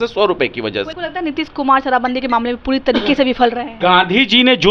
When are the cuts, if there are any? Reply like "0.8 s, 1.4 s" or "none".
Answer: 0.9 s, 3.8 s